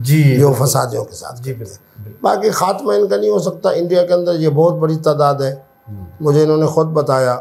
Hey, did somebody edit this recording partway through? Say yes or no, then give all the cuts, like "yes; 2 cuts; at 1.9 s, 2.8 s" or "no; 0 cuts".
no; 0 cuts